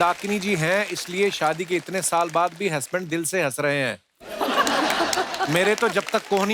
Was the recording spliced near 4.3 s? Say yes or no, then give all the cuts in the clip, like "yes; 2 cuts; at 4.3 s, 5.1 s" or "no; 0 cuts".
no; 0 cuts